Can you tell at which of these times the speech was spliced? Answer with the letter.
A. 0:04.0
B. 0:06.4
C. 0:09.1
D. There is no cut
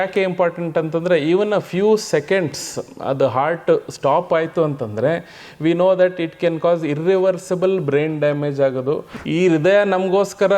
C